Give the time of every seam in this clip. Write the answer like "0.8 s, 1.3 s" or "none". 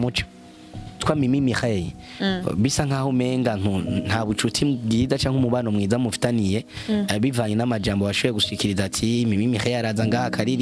1.0 s